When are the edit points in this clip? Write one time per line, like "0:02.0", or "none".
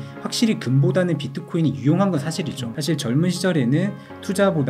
0:02.7